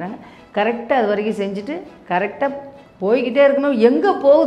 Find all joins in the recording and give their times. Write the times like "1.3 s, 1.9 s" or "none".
none